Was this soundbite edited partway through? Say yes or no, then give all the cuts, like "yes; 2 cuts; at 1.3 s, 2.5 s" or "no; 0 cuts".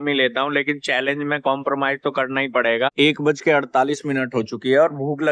yes; 1 cut; at 2.9 s